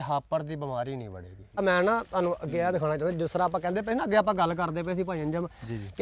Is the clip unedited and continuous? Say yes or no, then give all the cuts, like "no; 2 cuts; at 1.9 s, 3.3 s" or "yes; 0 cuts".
no; 1 cut; at 1.6 s